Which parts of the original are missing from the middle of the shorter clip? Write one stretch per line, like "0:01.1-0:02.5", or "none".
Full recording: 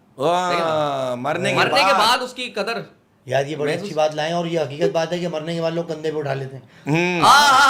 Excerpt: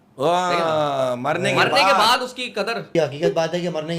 0:02.9-0:04.5